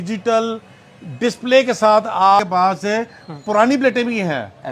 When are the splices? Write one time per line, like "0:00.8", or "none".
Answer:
0:02.4